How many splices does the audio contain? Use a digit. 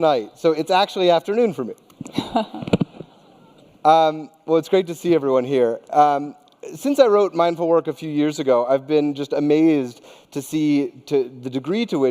1